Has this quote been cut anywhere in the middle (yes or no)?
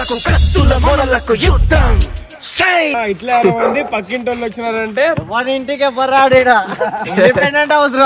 no